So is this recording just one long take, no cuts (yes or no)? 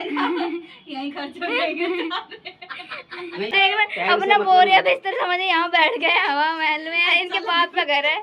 no